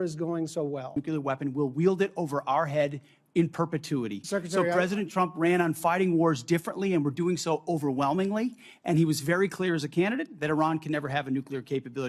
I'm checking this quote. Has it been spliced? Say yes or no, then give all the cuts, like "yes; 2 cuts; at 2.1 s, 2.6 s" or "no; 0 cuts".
yes; 1 cut; at 1.0 s